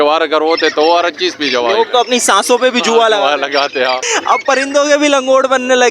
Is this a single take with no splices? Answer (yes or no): no